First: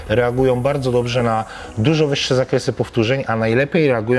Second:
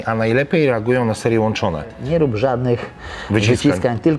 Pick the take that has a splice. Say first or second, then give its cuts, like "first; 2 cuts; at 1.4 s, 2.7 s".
second; 1 cut; at 2.0 s